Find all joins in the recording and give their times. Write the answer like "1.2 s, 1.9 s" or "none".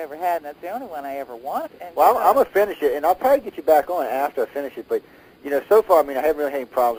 none